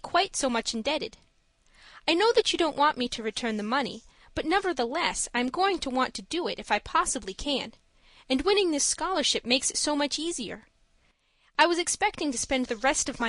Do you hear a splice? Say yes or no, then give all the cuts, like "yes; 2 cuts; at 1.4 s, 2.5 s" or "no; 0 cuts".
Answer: yes; 1 cut; at 3.8 s